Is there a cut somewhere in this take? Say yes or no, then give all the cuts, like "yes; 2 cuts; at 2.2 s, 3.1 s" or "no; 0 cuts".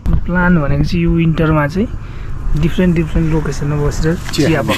no; 0 cuts